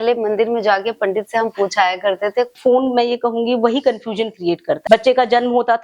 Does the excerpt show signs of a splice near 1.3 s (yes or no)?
no